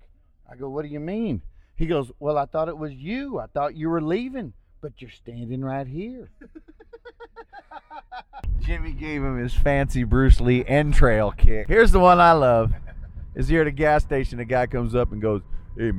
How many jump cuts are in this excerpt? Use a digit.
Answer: 2